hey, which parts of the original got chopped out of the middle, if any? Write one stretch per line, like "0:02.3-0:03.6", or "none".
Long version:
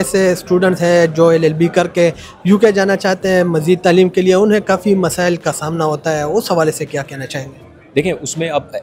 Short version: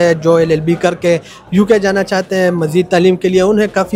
none